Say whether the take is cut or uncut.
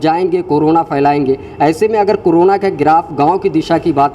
uncut